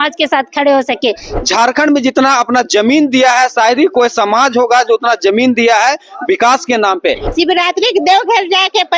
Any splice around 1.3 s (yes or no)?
yes